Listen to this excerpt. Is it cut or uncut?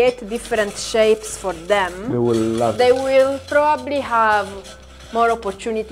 uncut